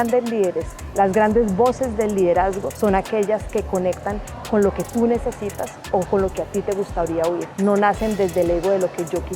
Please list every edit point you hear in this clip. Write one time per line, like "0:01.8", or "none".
0:02.7
0:07.5